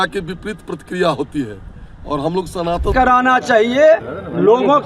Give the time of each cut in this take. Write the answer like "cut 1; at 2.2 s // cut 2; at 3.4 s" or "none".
cut 1; at 2.9 s